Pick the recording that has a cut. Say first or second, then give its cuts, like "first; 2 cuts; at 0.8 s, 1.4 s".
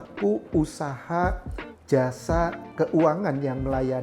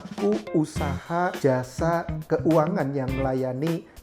second; 1 cut; at 1.4 s